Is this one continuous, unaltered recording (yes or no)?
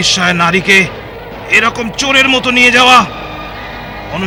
yes